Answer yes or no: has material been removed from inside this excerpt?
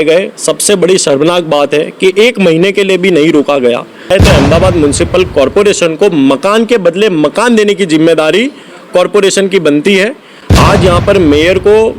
yes